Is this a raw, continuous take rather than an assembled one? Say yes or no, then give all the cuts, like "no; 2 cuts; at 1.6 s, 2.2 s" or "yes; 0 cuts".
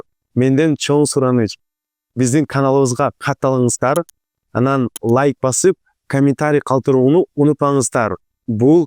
yes; 0 cuts